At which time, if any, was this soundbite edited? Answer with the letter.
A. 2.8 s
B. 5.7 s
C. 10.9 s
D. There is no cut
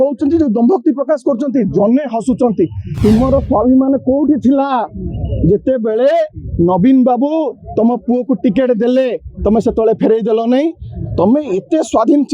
A